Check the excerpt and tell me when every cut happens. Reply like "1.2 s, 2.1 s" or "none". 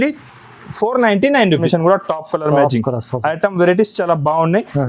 1.6 s